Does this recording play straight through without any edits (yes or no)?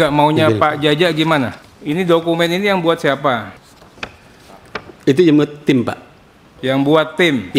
no